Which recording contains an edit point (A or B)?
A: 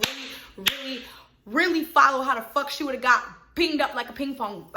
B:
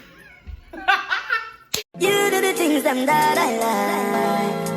B